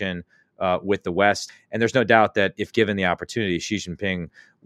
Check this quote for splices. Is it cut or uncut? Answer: cut